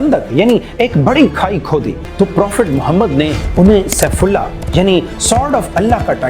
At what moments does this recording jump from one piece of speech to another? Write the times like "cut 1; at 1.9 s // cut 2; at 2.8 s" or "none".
cut 1; at 2.0 s